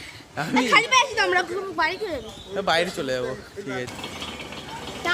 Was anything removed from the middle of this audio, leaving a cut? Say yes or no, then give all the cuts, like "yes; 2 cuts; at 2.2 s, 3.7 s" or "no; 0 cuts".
yes; 1 cut; at 3.9 s